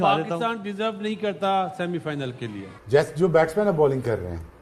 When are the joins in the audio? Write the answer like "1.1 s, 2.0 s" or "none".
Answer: 2.8 s